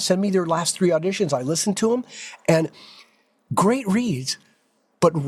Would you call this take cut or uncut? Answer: uncut